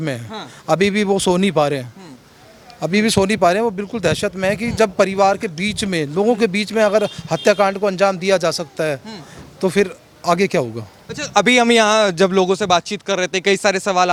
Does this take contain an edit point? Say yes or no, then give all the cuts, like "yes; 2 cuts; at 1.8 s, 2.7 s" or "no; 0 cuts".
no; 0 cuts